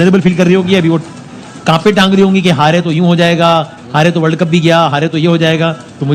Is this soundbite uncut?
yes; 0 cuts

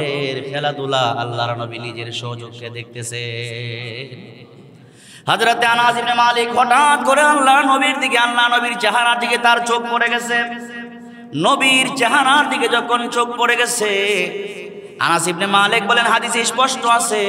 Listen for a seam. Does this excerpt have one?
no; 0 cuts

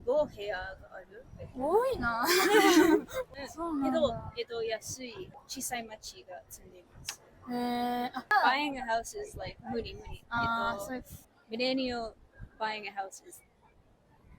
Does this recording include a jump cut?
yes; 3 cuts; at 3.2 s, 5.3 s, 8.2 s

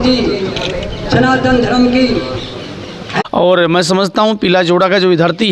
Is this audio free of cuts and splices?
no; 1 cut; at 3.1 s

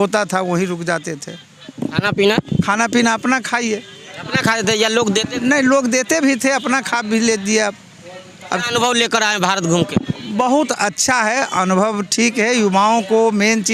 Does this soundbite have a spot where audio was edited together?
no; 0 cuts

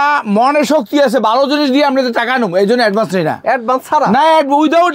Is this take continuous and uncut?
yes; 0 cuts

